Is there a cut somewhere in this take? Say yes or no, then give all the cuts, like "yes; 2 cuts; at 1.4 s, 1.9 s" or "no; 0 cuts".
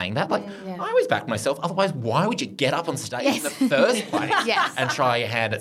no; 0 cuts